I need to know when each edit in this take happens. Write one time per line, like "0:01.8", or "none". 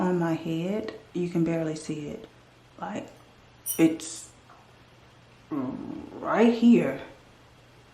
none